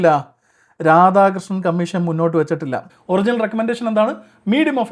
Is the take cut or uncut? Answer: cut